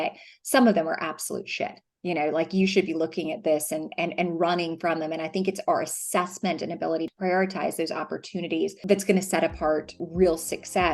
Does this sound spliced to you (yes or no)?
yes